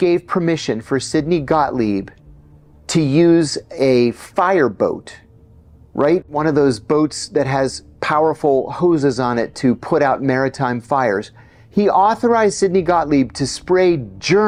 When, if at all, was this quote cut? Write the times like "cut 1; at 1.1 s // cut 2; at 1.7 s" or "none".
none